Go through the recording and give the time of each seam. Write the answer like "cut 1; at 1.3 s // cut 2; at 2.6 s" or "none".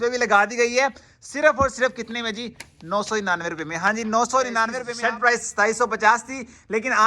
cut 1; at 4.8 s